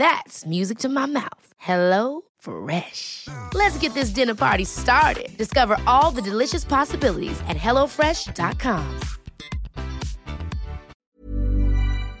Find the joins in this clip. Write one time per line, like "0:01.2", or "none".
0:10.9